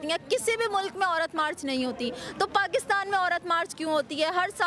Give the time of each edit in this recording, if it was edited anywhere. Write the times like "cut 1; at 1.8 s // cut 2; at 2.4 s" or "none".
none